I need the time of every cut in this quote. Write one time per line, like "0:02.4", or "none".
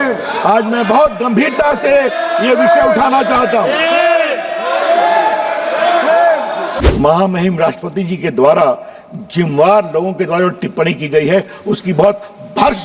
0:06.7